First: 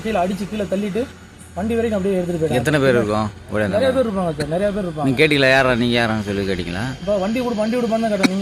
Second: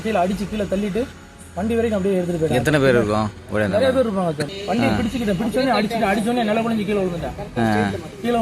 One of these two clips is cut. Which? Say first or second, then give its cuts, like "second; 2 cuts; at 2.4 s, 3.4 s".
second; 1 cut; at 4.4 s